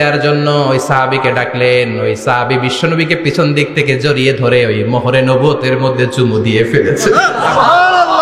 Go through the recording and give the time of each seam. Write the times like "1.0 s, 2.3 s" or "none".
none